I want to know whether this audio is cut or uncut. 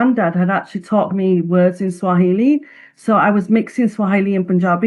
uncut